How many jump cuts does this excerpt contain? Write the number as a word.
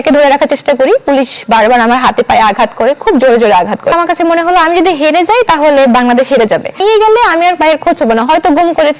two